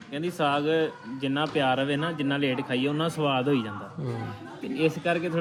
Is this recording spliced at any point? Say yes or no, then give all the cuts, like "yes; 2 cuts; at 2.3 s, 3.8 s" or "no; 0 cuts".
no; 0 cuts